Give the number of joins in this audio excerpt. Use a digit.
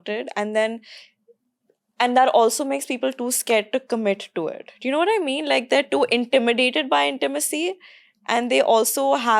0